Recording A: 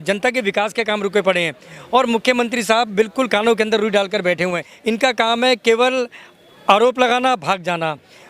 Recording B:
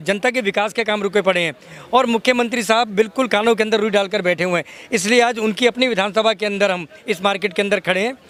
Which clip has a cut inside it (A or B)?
A